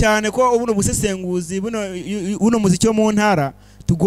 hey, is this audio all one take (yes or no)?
yes